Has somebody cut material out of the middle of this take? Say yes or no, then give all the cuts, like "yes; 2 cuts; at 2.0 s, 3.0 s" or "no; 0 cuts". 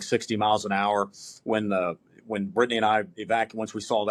no; 0 cuts